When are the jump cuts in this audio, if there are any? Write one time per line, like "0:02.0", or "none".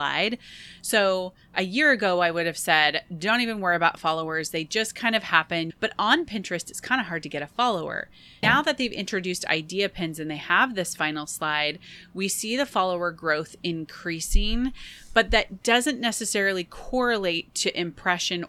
0:05.7
0:08.4